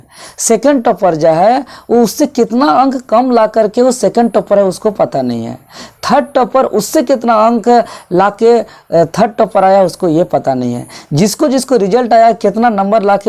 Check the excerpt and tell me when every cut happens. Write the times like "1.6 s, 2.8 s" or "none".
none